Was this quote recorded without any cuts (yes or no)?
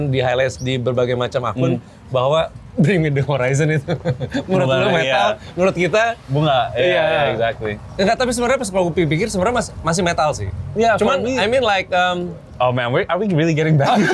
yes